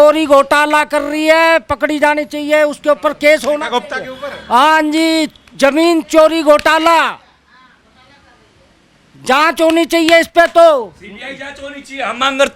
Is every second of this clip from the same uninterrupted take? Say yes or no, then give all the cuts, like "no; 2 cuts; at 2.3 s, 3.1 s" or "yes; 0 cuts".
yes; 0 cuts